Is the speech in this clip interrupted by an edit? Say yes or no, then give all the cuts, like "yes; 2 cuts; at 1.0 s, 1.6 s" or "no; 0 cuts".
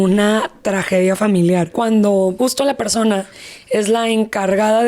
yes; 2 cuts; at 1.7 s, 2.4 s